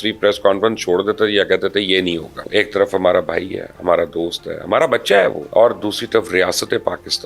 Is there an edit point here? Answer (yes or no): yes